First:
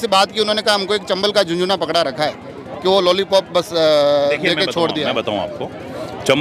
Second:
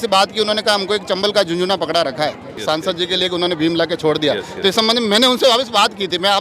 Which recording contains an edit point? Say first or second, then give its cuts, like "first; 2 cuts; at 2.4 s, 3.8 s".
second; 1 cut; at 2.6 s